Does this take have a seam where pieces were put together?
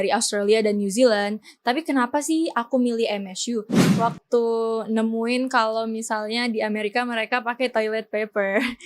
yes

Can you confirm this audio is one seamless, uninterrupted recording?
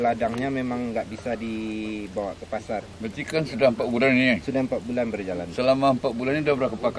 yes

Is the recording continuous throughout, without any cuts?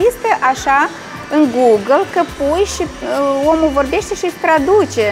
yes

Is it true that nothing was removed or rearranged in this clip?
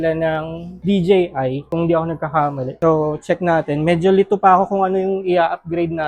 yes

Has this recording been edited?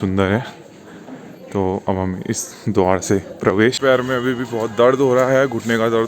yes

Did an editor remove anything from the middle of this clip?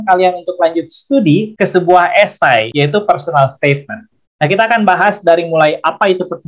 yes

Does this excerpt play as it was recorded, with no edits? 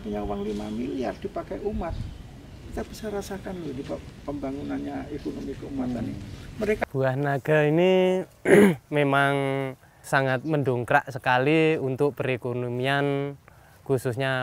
no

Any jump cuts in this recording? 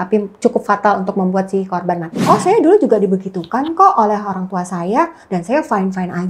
yes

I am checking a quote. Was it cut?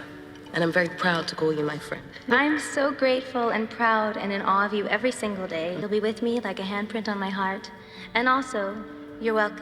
yes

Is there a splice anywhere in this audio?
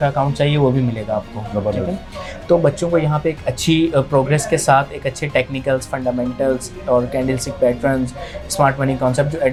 no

